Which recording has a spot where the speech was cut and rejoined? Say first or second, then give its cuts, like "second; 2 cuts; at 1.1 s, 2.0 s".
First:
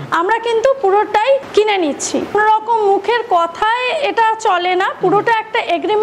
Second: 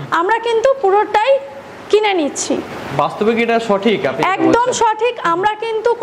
first; 2 cuts; at 1.5 s, 2.3 s